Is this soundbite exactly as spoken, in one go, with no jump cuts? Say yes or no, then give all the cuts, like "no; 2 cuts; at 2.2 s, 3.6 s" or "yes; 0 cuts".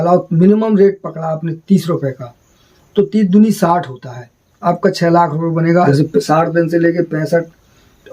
no; 1 cut; at 5.9 s